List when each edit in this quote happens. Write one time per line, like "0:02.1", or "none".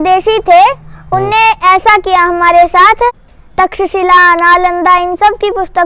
0:03.3